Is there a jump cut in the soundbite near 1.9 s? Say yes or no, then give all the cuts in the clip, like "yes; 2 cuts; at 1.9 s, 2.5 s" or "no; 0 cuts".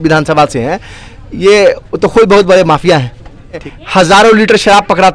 no; 1 cut; at 3.7 s